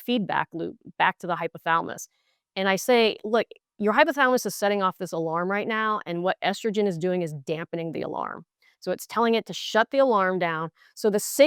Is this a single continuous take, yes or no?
yes